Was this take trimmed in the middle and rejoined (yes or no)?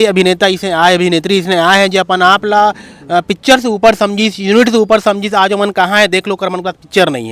no